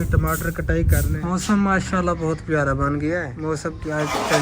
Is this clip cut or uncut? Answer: cut